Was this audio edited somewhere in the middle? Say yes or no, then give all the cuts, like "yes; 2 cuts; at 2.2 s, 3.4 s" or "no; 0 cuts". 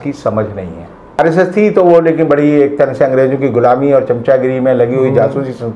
yes; 1 cut; at 1.2 s